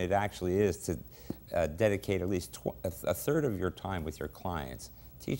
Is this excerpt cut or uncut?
uncut